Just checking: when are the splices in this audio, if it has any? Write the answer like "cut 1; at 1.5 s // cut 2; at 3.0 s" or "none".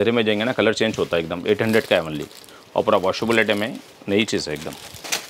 none